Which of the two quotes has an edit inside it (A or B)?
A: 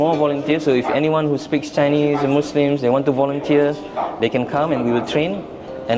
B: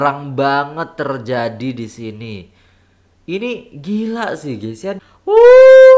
B